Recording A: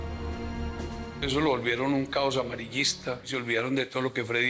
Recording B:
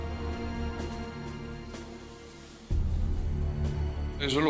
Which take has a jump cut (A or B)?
A